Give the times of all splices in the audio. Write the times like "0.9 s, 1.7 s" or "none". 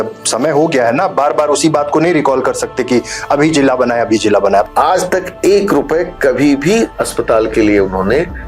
4.6 s, 7.0 s